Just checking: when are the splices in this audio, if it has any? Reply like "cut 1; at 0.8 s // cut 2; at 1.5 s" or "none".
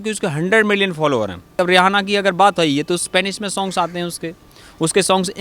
cut 1; at 1.5 s